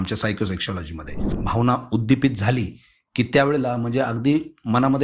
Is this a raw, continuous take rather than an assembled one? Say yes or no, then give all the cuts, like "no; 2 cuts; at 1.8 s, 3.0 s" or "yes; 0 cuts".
no; 1 cut; at 1.3 s